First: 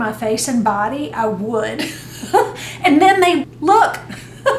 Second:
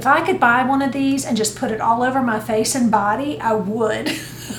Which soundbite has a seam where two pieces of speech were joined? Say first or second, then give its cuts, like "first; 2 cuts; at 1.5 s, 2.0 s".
first; 1 cut; at 3.5 s